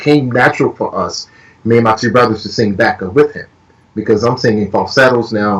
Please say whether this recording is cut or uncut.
uncut